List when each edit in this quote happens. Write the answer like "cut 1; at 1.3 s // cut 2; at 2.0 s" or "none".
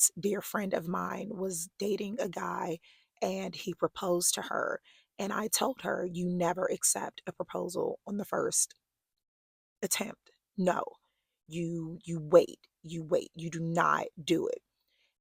none